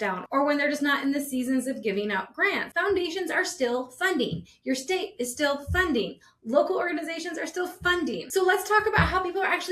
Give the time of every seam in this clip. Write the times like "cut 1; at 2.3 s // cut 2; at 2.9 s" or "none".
cut 1; at 2.7 s // cut 2; at 8.2 s